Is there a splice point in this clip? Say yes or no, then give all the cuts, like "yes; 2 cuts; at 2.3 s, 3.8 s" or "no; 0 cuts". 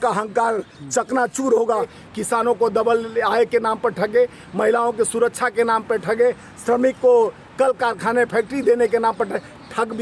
yes; 1 cut; at 2.0 s